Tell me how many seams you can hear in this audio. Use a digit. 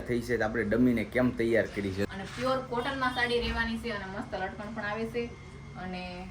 1